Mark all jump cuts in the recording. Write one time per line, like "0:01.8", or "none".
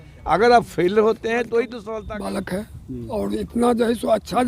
0:01.8